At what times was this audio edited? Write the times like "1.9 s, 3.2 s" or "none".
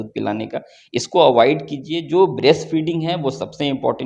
none